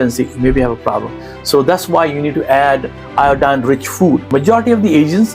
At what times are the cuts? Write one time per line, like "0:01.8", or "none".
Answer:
0:04.3